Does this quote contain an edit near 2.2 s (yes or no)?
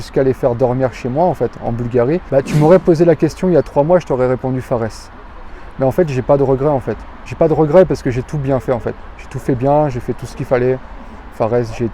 yes